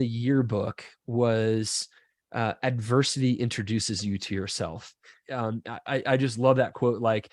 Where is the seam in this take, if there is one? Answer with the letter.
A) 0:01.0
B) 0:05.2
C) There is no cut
B